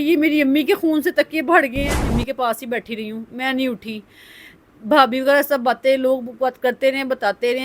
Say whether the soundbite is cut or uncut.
cut